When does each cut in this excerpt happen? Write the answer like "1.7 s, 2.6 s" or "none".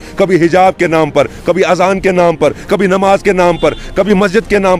none